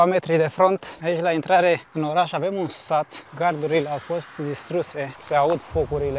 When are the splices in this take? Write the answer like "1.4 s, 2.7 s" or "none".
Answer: 0.9 s, 3.2 s, 5.1 s